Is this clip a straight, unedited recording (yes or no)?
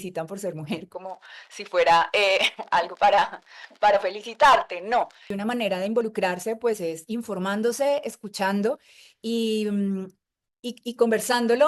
no